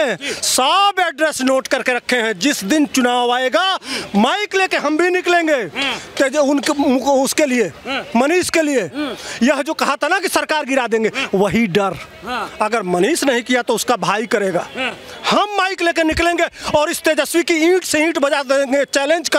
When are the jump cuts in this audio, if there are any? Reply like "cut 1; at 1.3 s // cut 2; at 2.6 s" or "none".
none